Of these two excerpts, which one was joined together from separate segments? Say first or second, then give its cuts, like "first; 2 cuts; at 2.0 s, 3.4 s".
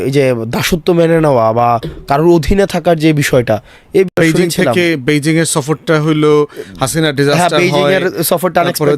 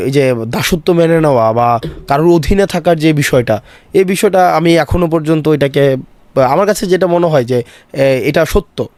first; 1 cut; at 4.1 s